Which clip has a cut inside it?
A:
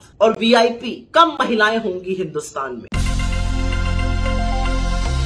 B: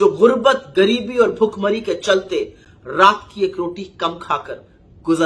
A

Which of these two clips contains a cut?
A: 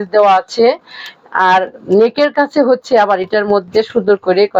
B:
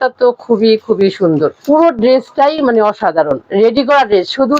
B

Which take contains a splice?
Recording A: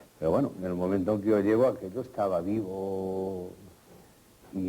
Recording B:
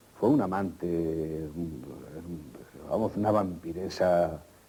A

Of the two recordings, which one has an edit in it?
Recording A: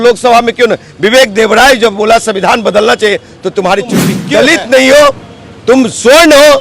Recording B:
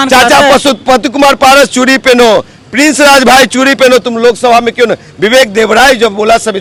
A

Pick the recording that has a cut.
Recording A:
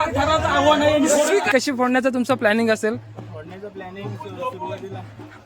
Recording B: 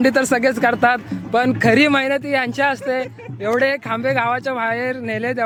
A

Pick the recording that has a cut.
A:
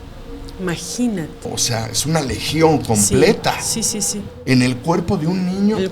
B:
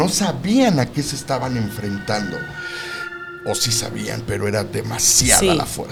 A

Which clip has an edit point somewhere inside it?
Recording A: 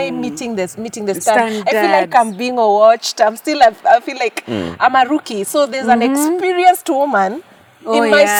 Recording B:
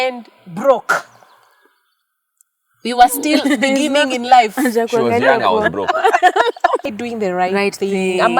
B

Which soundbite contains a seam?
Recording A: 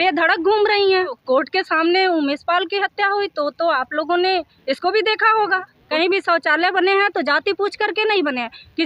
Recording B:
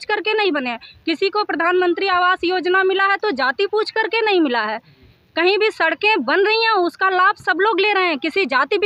A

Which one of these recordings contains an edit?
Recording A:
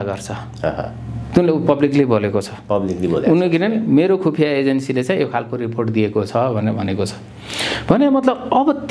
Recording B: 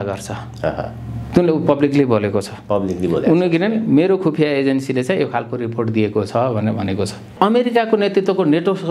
B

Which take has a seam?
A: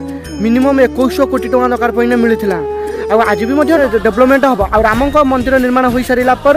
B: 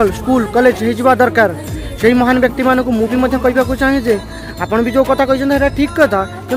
A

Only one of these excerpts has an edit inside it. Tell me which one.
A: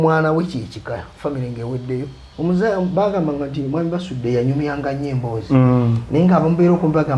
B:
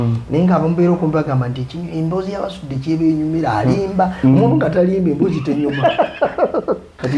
A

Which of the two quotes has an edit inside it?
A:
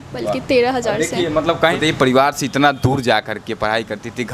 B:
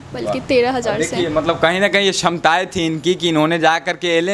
A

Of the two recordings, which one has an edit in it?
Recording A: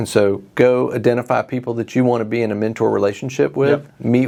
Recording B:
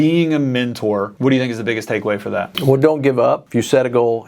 B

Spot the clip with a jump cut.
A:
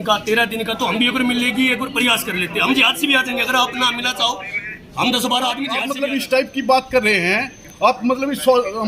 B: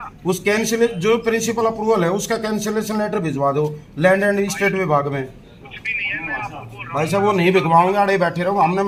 A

